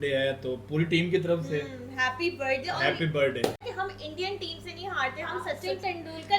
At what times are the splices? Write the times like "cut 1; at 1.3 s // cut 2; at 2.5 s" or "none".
cut 1; at 3.6 s